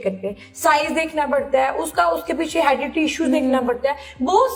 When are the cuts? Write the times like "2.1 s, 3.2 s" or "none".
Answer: none